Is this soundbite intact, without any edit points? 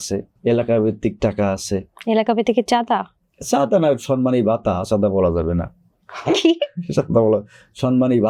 yes; 0 cuts

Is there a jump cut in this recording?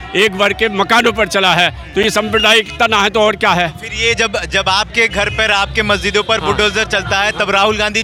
no; 0 cuts

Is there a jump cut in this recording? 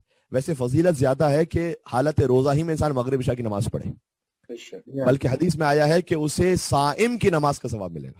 no; 0 cuts

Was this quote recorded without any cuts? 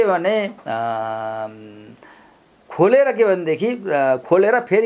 yes; 0 cuts

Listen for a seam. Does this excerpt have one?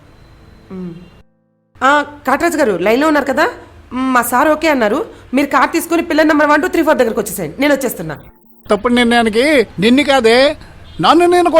yes; 1 cut; at 8.7 s

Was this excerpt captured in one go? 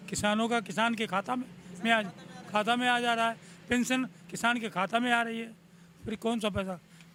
yes; 0 cuts

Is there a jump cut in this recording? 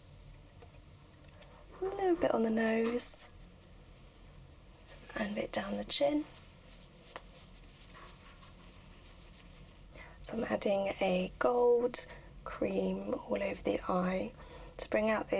yes; 2 cuts; at 1.4 s, 9.9 s

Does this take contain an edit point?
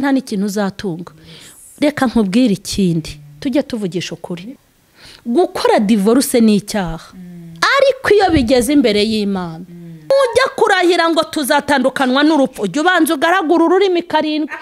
yes; 2 cuts; at 4.6 s, 10.1 s

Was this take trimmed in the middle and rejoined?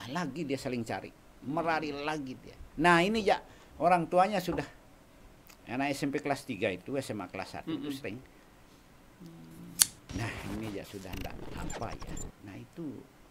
no; 0 cuts

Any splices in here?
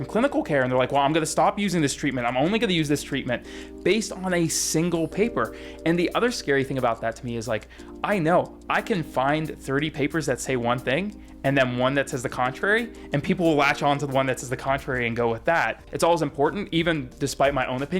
yes; 1 cut; at 15.8 s

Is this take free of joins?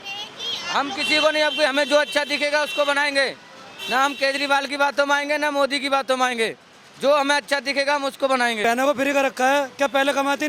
no; 1 cut; at 8.6 s

